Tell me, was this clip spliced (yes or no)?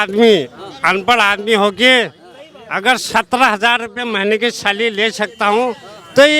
no